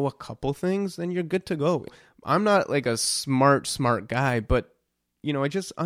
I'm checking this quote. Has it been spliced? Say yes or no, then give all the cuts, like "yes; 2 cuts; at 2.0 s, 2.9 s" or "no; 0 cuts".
yes; 1 cut; at 1.9 s